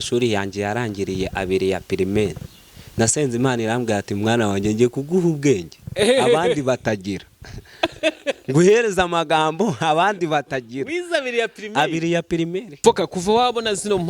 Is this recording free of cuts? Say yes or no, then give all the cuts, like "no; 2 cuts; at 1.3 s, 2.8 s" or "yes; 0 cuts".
no; 1 cut; at 12.7 s